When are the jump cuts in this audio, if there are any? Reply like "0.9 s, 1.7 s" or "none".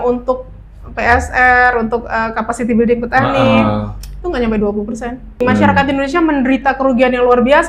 5.4 s